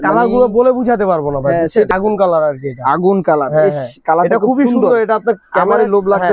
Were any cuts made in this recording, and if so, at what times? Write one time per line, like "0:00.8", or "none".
0:01.9